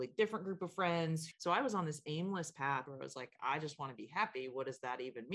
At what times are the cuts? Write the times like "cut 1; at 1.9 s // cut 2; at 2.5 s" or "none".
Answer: cut 1; at 1.3 s // cut 2; at 2.8 s